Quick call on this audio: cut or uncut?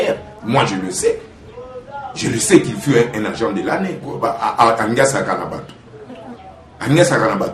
cut